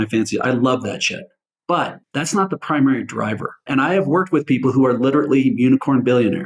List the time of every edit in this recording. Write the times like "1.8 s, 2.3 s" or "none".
2.0 s, 3.7 s